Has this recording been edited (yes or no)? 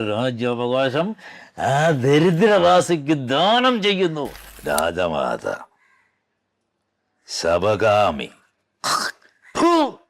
yes